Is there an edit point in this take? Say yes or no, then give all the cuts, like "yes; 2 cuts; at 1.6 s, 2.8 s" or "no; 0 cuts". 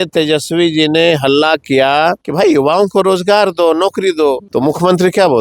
yes; 2 cuts; at 2.2 s, 4.4 s